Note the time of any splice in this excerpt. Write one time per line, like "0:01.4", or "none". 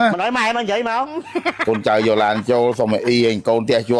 0:01.5